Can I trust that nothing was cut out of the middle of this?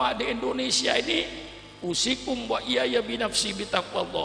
yes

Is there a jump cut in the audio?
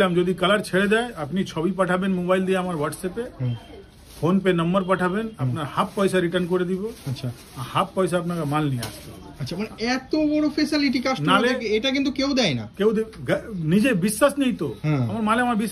no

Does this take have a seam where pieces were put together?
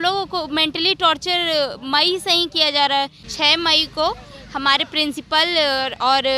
yes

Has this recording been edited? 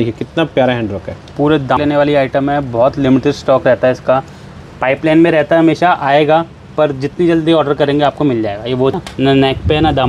yes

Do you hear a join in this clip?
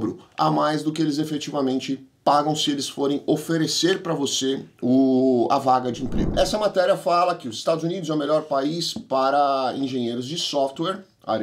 no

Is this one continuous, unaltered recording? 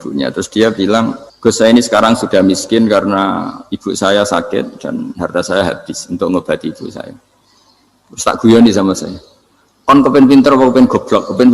no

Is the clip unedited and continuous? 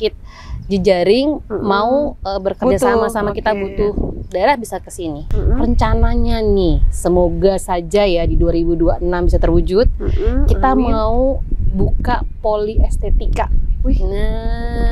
no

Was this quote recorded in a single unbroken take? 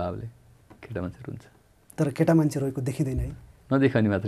yes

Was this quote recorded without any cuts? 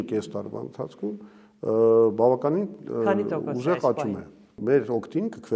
no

